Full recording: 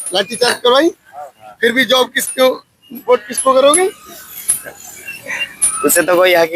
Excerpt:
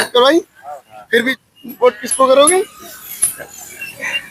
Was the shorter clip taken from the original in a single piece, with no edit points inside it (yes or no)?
no